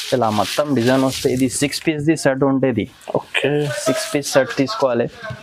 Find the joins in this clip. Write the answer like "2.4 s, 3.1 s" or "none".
none